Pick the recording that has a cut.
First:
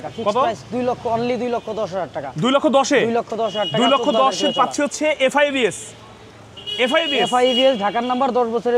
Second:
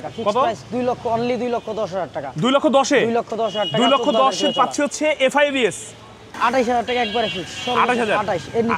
second; 1 cut; at 6.2 s

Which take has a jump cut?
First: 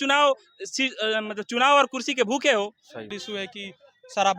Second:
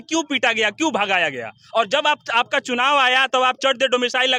first; 1 cut; at 3.1 s

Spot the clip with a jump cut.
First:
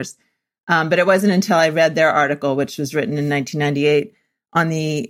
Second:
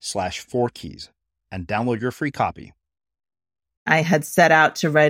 second; 1 cut; at 3.9 s

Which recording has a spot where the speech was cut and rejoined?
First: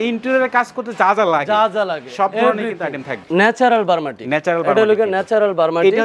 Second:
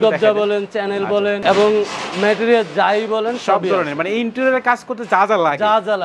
first; 1 cut; at 3.2 s

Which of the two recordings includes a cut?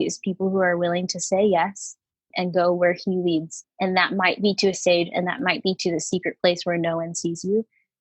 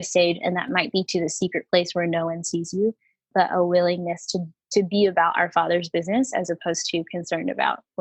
first; 2 cuts; at 2.1 s, 3.6 s

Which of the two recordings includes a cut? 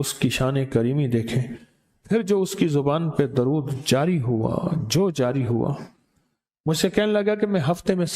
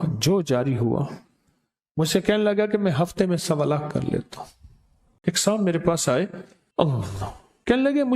second; 1 cut; at 5.1 s

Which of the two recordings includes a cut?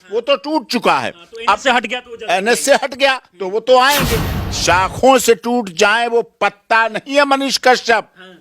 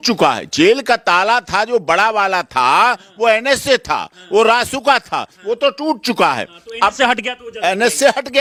first; 1 cut; at 4.2 s

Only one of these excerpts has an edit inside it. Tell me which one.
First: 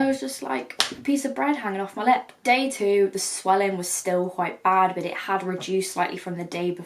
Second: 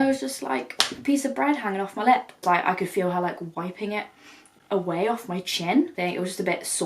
second; 2 cuts; at 2.4 s, 5.9 s

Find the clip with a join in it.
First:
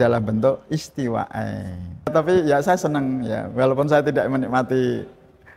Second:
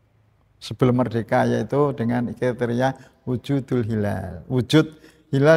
first; 1 cut; at 2.1 s

